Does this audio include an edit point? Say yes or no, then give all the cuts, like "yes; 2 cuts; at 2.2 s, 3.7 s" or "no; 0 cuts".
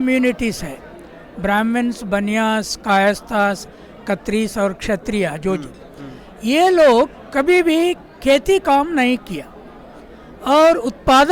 no; 0 cuts